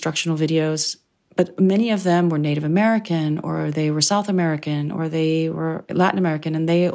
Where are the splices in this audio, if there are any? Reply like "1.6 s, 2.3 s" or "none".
1.5 s, 5.8 s